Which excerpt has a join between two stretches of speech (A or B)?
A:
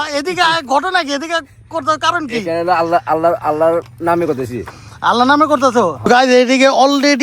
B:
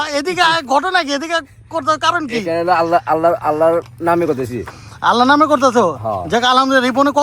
A